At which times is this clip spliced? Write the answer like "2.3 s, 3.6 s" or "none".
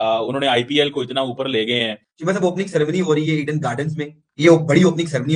2.1 s, 4.2 s